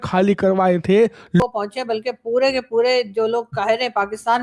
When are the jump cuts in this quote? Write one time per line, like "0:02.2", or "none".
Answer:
0:01.4